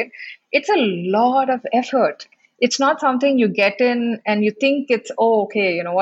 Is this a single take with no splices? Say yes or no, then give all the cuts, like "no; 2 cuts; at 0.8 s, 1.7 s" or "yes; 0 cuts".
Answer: yes; 0 cuts